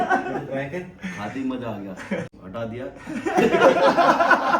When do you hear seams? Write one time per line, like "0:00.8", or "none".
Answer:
0:02.3